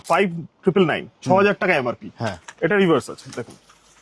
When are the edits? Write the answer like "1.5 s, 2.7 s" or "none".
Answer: none